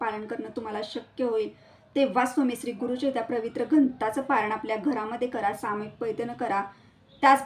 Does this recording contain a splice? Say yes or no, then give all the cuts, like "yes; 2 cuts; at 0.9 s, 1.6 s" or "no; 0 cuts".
no; 0 cuts